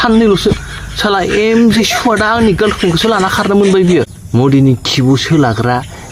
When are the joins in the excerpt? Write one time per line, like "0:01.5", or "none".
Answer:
0:04.2